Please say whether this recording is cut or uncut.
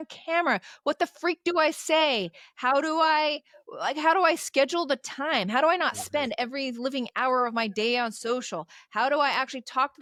uncut